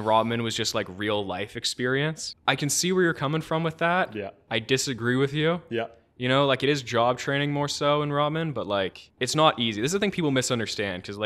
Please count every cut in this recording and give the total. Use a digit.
2